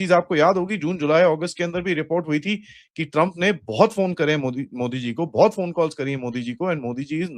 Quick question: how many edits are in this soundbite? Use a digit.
0